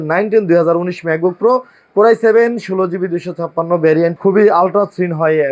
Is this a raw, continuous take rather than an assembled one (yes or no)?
no